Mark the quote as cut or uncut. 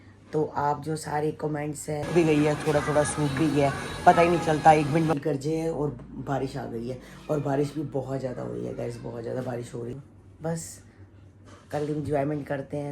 cut